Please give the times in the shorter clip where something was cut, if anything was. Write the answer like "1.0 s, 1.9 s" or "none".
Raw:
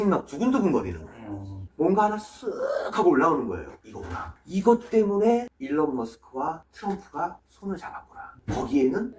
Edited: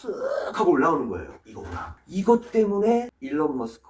none